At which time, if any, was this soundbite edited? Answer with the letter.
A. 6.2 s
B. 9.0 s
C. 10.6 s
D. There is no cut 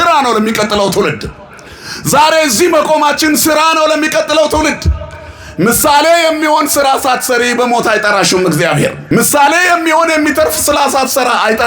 B